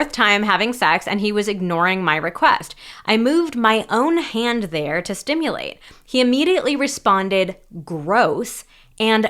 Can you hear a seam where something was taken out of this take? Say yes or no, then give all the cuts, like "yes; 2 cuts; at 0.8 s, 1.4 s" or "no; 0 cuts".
no; 0 cuts